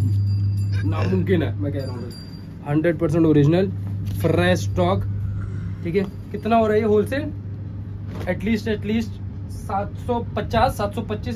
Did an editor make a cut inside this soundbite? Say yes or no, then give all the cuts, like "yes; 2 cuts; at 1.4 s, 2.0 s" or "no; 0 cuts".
no; 0 cuts